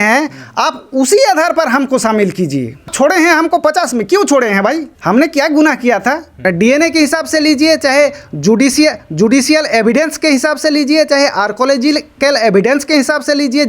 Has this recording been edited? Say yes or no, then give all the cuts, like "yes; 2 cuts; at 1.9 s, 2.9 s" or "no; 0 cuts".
yes; 3 cuts; at 2.8 s, 4.9 s, 6.4 s